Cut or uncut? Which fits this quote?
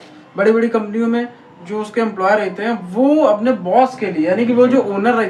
uncut